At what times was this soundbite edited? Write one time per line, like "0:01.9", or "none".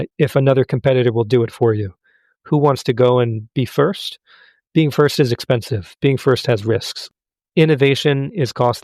0:07.0

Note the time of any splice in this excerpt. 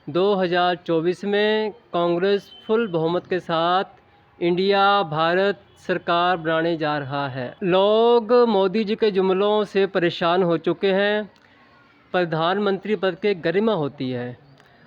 none

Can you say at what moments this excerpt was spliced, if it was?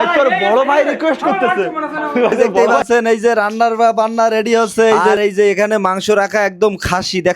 0:02.8
0:05.1

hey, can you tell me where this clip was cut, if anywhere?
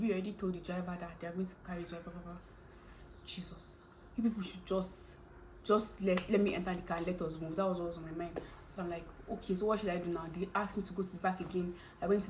none

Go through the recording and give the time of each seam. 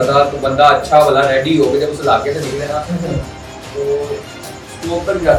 none

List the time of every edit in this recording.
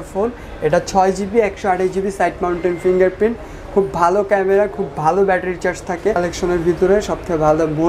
0:06.2

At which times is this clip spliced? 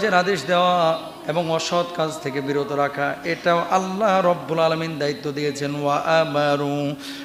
none

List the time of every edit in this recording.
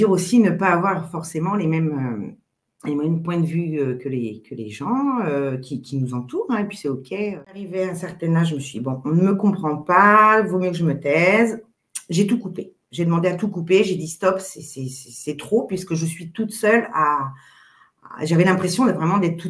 0:07.5

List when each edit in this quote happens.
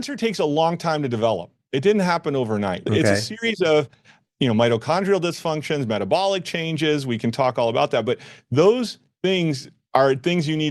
none

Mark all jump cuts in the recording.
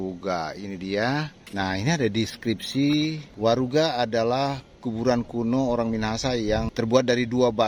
0:01.4
0:03.2
0:06.7

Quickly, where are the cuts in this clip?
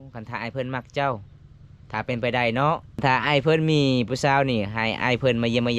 0:02.9

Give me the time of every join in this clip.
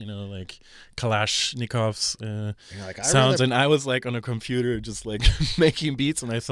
none

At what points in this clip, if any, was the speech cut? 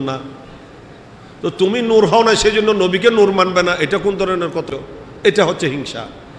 0:04.7

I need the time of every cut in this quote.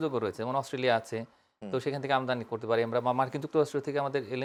none

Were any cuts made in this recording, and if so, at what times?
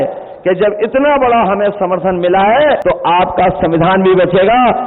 0:02.8

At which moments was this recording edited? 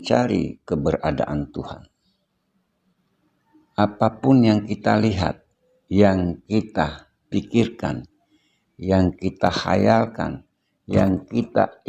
0:03.0

